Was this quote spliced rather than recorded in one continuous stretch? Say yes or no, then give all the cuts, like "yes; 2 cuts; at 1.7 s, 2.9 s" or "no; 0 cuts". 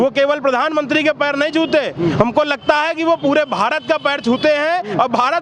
no; 0 cuts